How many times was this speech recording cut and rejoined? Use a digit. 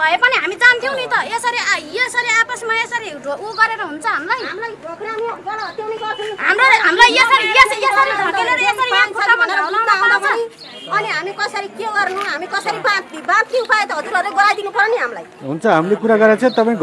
0